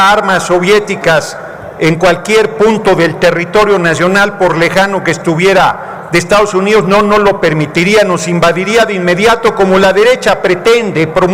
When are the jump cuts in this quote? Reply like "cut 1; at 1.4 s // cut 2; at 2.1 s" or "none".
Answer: none